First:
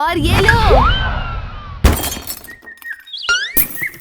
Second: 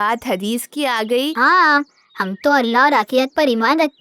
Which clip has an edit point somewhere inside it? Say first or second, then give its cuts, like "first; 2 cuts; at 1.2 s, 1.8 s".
second; 1 cut; at 1.3 s